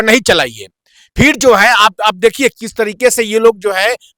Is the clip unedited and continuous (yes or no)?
yes